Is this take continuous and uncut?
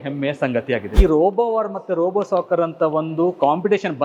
no; 1 cut; at 0.9 s

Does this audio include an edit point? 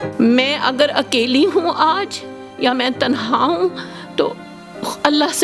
no; 0 cuts

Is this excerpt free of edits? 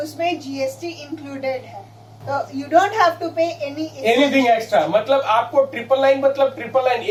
yes; 0 cuts

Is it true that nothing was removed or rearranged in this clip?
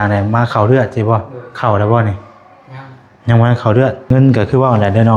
no; 1 cut; at 4.1 s

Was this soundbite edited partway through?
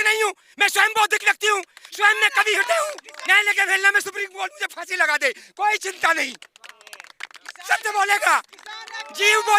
yes; 1 cut; at 3.1 s

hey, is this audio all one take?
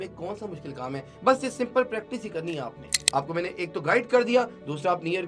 no; 1 cut; at 2.9 s

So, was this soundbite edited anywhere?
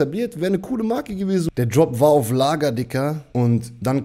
yes; 2 cuts; at 1.5 s, 3.2 s

